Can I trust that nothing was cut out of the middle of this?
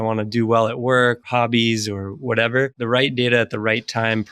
no; 2 cuts; at 1.2 s, 2.8 s

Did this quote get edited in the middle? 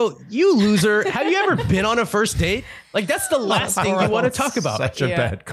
no; 0 cuts

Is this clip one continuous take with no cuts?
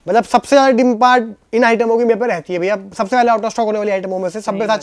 yes; 0 cuts

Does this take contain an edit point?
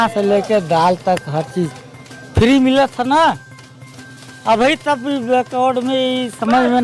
no; 0 cuts

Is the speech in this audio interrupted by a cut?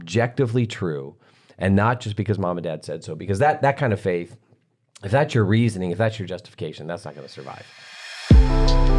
yes; 1 cut; at 7.8 s

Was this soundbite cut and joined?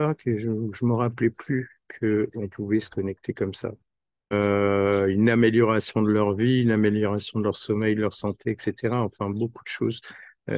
yes; 1 cut; at 4.3 s

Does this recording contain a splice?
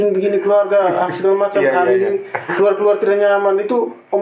no; 0 cuts

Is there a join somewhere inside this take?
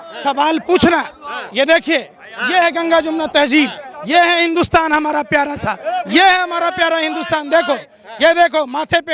no; 0 cuts

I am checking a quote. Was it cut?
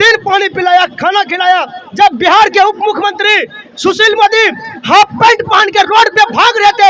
no; 0 cuts

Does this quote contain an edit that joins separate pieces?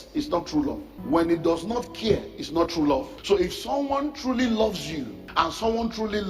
yes; 3 cuts; at 0.9 s, 3.1 s, 5.2 s

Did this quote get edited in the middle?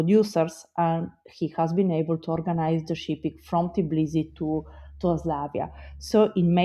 no; 0 cuts

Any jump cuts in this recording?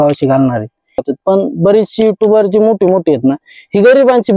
yes; 1 cut; at 1.1 s

